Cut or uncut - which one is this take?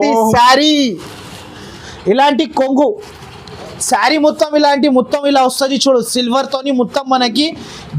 cut